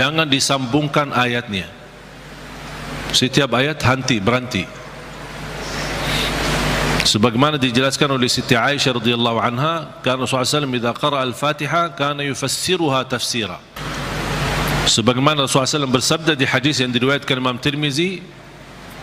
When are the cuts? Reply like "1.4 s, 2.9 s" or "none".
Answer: 13.8 s